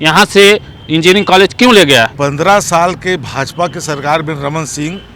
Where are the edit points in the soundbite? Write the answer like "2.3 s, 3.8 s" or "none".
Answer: 2.1 s

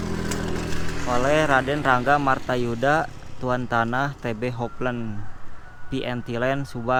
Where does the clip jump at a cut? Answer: none

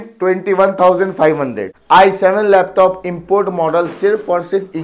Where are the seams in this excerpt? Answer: 1.7 s

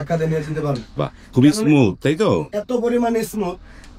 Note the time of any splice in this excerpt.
none

